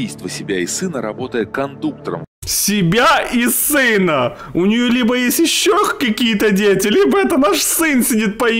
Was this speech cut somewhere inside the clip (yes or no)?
no